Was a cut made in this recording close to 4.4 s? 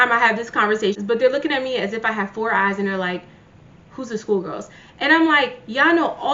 no; 1 cut; at 1.0 s

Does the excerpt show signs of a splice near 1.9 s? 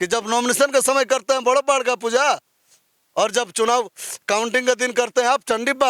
no; 0 cuts

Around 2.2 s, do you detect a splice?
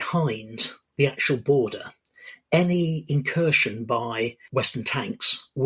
no; 1 cut; at 4.4 s

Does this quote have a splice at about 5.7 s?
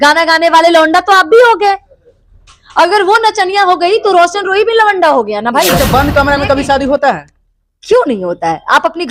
yes; 1 cut; at 5.7 s

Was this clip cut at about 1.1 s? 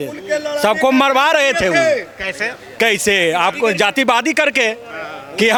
no; 0 cuts

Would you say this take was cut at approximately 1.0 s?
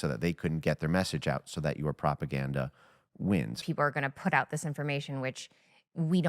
no; 1 cut; at 3.6 s

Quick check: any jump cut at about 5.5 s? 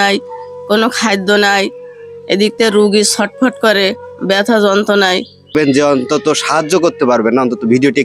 yes; 1 cut; at 5.5 s

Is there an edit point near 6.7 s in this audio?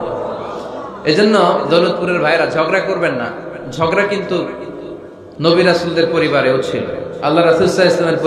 no; 0 cuts

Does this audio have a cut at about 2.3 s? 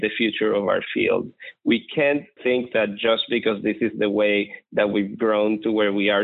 yes; 1 cut; at 2.3 s

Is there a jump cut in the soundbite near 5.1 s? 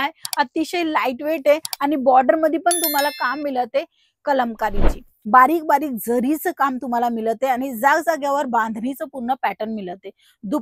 yes; 1 cut; at 5.1 s

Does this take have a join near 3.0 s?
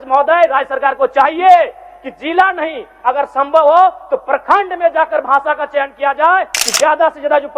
no; 1 cut; at 6.5 s

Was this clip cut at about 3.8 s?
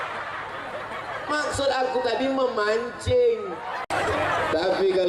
yes; 1 cut; at 3.8 s

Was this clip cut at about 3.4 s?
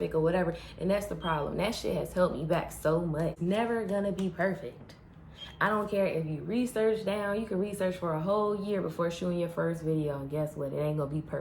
yes; 1 cut; at 3.4 s

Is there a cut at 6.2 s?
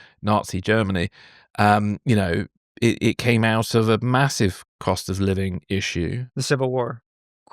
yes; 1 cut; at 6.2 s

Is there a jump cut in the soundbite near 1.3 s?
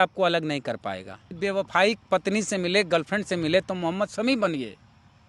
yes; 1 cut; at 1.3 s

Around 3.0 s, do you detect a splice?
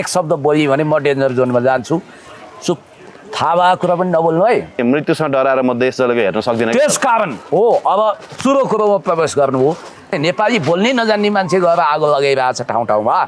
no; 2 cuts; at 4.8 s, 10.2 s

